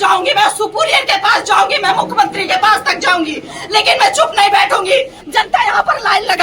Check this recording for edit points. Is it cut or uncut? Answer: cut